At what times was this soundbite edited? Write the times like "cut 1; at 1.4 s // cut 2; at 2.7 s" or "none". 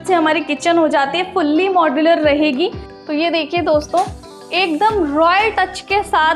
cut 1; at 2.9 s